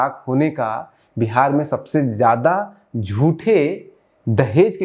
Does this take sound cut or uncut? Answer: uncut